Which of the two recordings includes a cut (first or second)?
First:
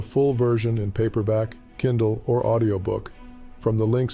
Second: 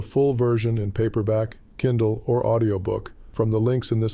second